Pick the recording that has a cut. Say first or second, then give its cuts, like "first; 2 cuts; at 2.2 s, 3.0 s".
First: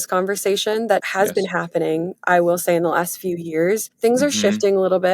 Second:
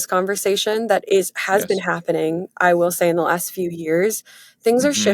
first; 2 cuts; at 1.0 s, 3.9 s